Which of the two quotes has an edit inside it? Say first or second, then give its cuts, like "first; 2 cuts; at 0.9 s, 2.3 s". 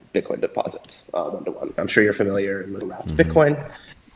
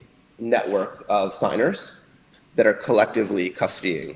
first; 2 cuts; at 1.7 s, 2.9 s